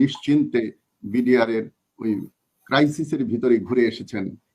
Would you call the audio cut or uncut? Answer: uncut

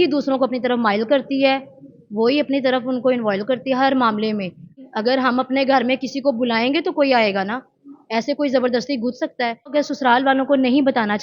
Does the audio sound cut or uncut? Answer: cut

